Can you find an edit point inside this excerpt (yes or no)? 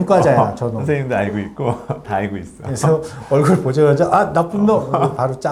no